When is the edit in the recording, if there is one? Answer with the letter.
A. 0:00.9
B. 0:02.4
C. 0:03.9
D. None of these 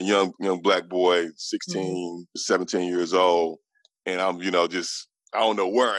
B